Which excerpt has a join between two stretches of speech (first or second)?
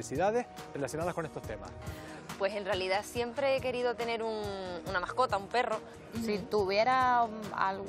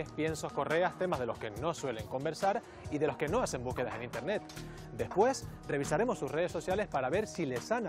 first